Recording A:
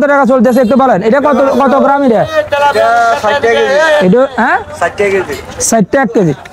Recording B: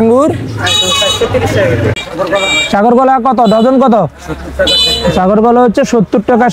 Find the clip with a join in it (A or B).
B